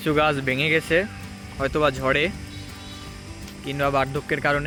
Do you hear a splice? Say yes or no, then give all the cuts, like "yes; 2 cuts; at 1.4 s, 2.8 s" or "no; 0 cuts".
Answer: no; 0 cuts